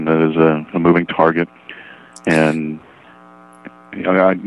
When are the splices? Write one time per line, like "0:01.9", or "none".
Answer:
none